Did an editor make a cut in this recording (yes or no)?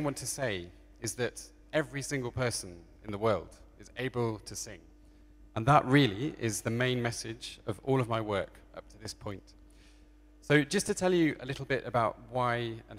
no